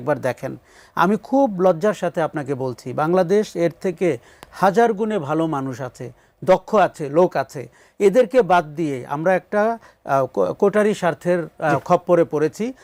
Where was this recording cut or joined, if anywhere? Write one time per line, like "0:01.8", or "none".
none